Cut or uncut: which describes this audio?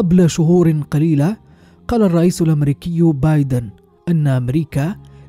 uncut